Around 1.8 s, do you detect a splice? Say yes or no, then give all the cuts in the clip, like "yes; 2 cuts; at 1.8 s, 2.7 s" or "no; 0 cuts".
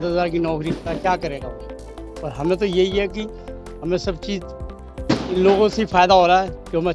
no; 0 cuts